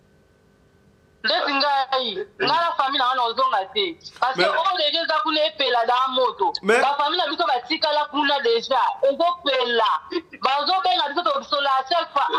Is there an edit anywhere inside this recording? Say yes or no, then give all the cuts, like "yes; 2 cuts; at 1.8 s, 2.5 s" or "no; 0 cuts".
no; 0 cuts